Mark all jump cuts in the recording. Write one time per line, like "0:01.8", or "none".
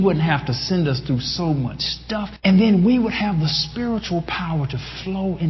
0:02.3